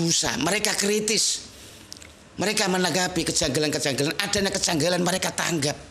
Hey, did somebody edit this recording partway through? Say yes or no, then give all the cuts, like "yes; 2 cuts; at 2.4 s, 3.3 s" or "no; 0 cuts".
no; 0 cuts